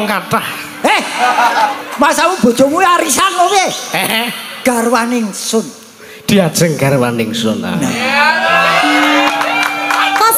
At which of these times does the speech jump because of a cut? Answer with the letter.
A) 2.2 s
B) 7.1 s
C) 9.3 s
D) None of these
C